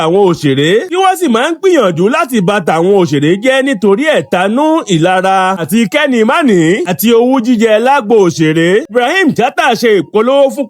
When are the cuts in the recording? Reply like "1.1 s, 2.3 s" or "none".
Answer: 8.9 s